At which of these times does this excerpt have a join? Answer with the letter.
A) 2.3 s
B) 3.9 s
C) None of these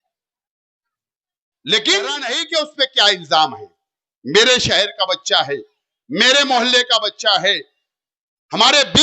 A